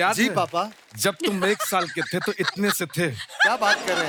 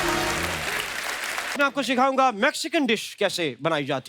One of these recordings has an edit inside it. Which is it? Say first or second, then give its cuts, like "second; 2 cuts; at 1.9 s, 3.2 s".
second; 1 cut; at 1.5 s